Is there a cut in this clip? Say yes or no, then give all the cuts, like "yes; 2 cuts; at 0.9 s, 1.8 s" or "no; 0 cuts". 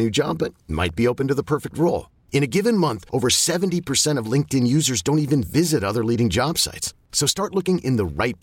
no; 0 cuts